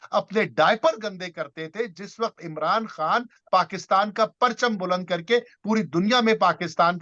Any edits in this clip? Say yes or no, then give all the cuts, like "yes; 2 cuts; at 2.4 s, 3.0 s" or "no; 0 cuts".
no; 0 cuts